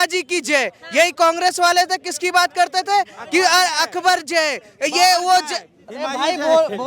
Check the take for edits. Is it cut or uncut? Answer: uncut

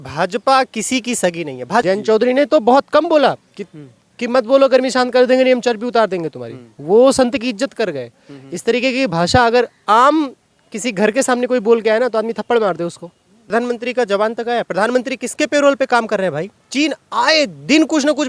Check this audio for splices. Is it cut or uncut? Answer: cut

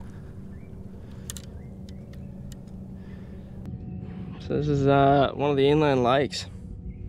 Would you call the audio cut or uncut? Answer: cut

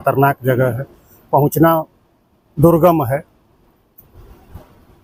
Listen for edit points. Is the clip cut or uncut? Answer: uncut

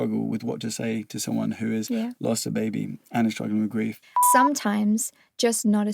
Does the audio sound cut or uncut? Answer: cut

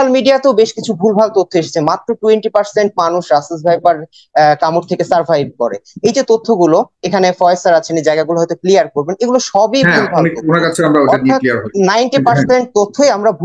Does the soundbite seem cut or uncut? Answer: uncut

